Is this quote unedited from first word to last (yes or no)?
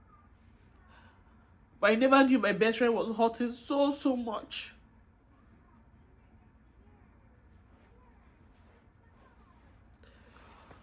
yes